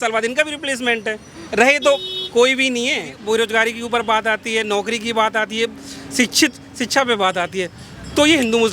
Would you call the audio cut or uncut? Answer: cut